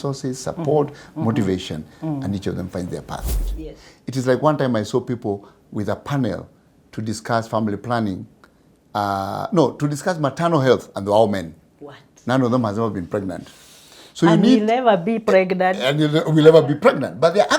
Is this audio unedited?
no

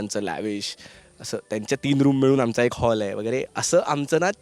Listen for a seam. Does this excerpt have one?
no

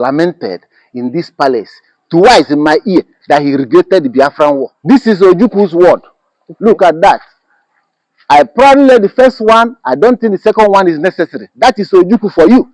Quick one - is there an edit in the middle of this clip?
yes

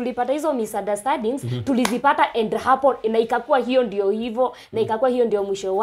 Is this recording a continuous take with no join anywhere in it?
yes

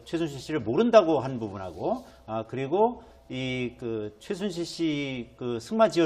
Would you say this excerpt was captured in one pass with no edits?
no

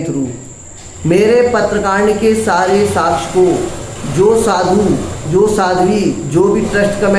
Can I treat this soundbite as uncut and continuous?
yes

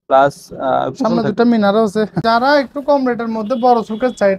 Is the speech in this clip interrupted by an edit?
yes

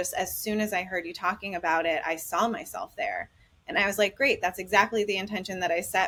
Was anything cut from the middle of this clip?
no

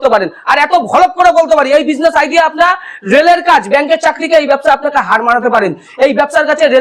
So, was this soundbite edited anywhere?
no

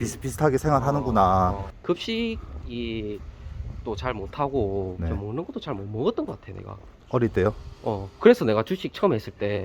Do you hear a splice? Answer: yes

